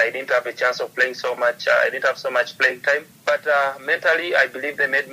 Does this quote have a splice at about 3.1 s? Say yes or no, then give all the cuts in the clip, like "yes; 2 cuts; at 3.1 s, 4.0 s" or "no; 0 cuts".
yes; 1 cut; at 3.1 s